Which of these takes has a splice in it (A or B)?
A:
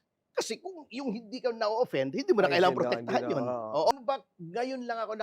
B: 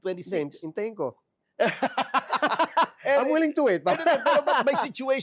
A